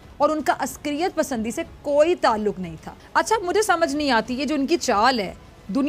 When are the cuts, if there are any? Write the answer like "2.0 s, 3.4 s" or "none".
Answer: 2.8 s